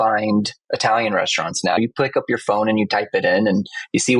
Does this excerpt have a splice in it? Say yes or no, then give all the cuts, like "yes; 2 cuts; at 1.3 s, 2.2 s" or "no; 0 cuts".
yes; 1 cut; at 1.8 s